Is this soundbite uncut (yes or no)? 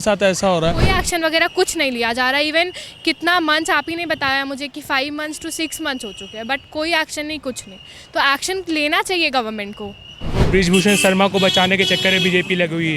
no